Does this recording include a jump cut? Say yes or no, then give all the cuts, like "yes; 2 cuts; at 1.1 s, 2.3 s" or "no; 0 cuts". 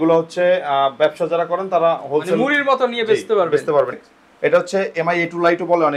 yes; 1 cut; at 4.0 s